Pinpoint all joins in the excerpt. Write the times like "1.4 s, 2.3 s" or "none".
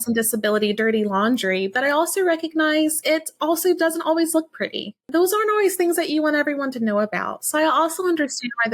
5.0 s